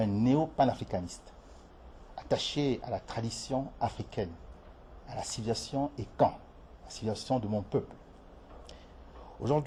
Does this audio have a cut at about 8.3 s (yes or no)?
no